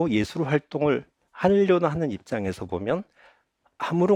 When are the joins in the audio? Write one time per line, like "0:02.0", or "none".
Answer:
none